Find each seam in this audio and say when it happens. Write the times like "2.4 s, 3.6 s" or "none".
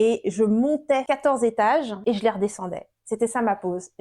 1.0 s, 1.9 s